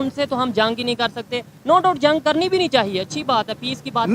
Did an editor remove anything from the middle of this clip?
no; 0 cuts

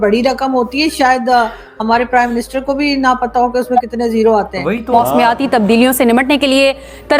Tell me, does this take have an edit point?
yes; 1 cut; at 5.0 s

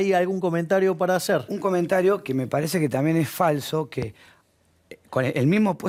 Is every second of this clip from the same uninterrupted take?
yes; 0 cuts

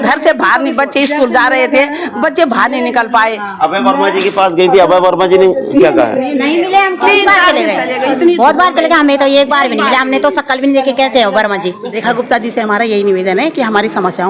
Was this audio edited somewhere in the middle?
yes; 1 cut; at 11.8 s

